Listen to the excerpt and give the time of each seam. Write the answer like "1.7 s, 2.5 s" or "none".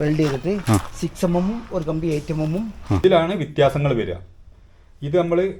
3.0 s